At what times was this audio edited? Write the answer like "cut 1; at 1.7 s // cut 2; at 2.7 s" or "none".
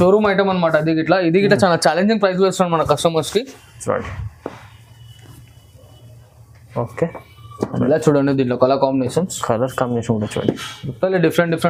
none